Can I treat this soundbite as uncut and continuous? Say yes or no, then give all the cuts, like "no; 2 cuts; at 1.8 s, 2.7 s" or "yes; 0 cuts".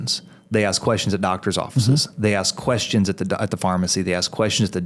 yes; 0 cuts